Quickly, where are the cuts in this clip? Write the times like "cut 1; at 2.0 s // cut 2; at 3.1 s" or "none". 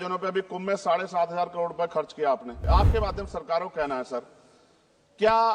cut 1; at 2.6 s